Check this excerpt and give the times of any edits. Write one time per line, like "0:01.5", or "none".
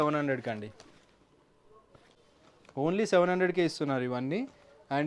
0:02.1